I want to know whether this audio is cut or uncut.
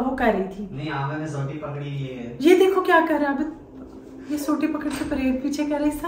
uncut